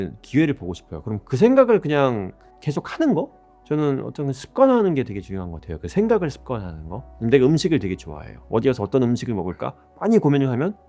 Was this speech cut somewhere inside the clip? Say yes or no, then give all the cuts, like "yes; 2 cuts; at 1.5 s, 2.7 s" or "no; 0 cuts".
no; 0 cuts